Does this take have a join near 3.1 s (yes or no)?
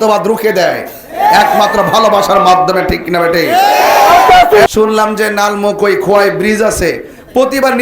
no